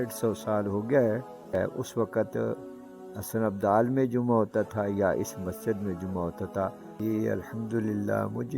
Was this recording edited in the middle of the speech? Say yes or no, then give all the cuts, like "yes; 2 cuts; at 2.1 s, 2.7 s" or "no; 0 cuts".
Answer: yes; 2 cuts; at 1.5 s, 6.9 s